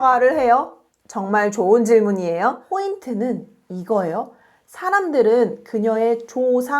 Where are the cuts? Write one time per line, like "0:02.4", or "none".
0:02.6